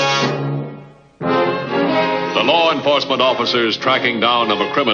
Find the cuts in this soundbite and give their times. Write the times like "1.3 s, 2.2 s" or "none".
4.0 s

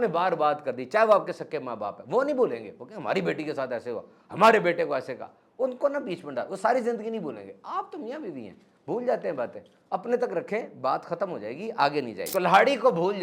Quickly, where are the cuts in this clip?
12.2 s

